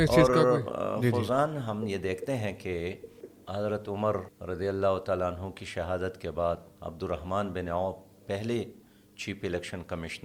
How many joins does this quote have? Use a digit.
0